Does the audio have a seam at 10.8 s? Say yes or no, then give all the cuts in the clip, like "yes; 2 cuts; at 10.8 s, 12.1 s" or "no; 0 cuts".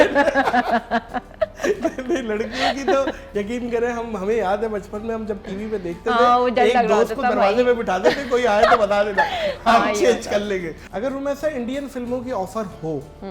yes; 1 cut; at 10.8 s